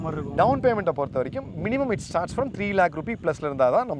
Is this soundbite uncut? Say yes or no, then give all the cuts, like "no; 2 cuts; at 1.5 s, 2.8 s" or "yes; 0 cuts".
yes; 0 cuts